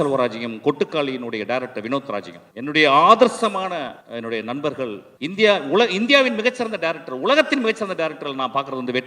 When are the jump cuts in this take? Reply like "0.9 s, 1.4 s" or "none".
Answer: 2.4 s, 4.0 s, 5.1 s